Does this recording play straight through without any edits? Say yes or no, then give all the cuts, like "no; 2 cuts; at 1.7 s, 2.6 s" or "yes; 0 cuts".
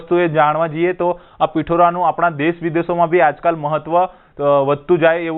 yes; 0 cuts